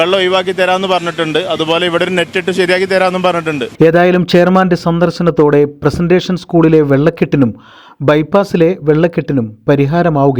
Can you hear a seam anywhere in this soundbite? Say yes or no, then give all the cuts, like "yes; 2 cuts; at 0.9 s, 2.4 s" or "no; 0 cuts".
no; 0 cuts